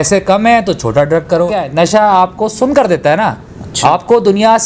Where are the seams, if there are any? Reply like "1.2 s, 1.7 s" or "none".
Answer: 1.6 s